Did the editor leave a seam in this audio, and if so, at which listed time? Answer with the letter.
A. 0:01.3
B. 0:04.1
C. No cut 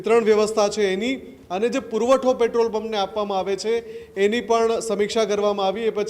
C